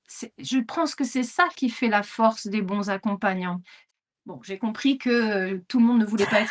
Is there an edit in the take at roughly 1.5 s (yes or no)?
no